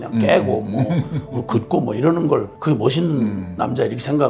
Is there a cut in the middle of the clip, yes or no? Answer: yes